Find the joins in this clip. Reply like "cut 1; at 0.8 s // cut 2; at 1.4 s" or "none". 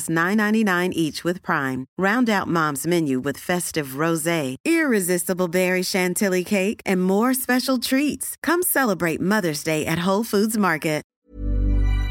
cut 1; at 11.0 s